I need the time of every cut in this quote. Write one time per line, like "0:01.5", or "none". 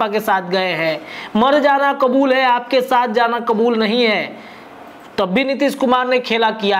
none